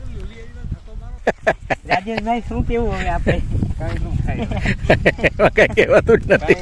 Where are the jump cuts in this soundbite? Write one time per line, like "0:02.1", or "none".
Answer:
0:01.1